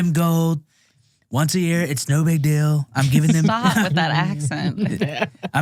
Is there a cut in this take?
no; 0 cuts

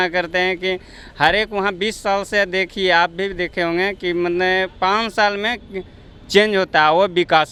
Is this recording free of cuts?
yes; 0 cuts

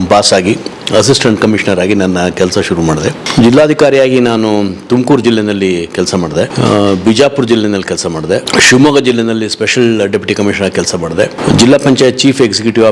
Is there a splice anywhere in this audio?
yes; 4 cuts; at 3.2 s, 6.5 s, 8.5 s, 11.4 s

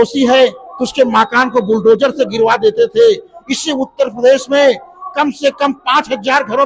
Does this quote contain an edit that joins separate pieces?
no; 0 cuts

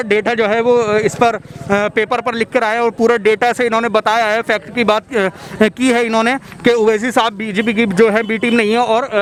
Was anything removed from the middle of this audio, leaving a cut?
no; 0 cuts

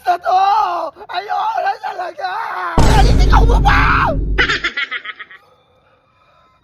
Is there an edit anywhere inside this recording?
no; 0 cuts

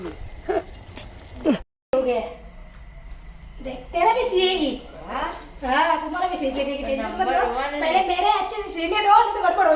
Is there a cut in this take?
yes; 1 cut; at 1.7 s

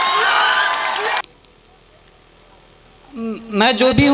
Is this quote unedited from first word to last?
no; 1 cut; at 1.2 s

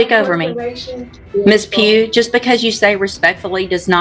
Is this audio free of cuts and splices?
no; 1 cut; at 1.2 s

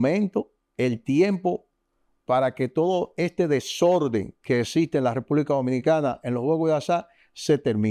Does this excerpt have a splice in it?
no; 0 cuts

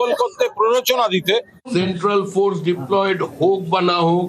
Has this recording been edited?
yes; 1 cut; at 1.6 s

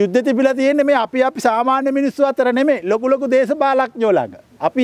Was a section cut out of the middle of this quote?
no; 0 cuts

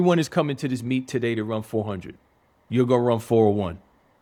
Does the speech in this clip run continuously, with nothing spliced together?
yes; 0 cuts

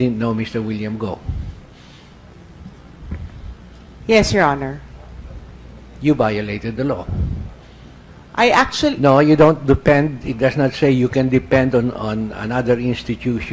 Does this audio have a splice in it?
yes; 1 cut; at 6.3 s

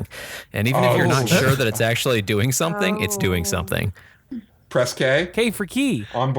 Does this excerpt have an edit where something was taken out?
yes; 1 cut; at 4.2 s

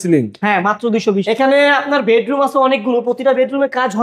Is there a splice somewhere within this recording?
yes; 1 cut; at 1.4 s

